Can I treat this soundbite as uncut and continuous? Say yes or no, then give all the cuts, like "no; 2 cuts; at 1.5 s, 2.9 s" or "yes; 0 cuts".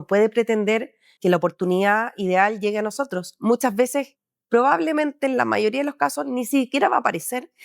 no; 1 cut; at 1.0 s